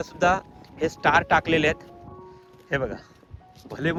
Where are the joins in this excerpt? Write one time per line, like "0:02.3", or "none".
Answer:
none